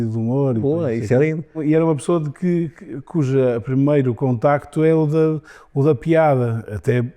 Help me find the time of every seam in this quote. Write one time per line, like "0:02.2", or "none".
0:01.6